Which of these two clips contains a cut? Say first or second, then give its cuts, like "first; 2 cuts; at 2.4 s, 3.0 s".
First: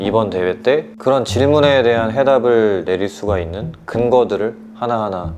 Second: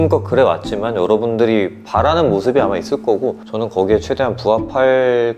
first; 1 cut; at 0.9 s